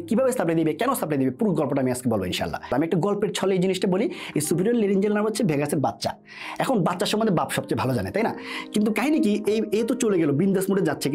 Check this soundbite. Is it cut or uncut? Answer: cut